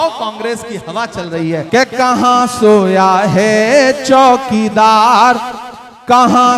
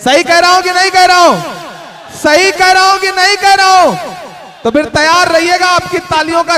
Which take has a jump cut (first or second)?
first